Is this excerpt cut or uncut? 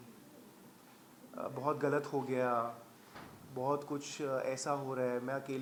uncut